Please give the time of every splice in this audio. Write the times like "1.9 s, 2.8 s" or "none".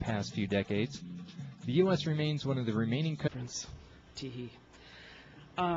none